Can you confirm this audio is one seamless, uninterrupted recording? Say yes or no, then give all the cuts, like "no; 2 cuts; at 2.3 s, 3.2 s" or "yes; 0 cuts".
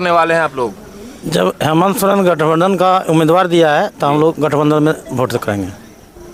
yes; 0 cuts